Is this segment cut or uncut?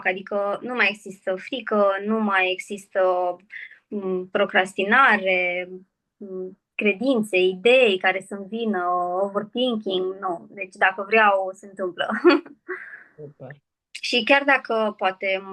uncut